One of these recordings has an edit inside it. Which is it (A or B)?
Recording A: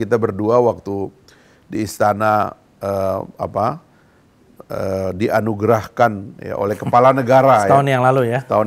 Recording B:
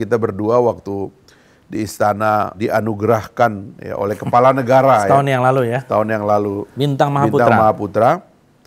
B